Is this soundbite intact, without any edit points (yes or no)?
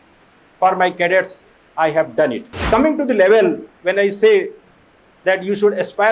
no